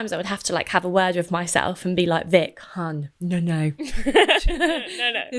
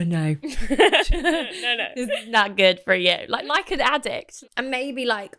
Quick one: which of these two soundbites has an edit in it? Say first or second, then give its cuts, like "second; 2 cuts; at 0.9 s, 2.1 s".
second; 1 cut; at 4.4 s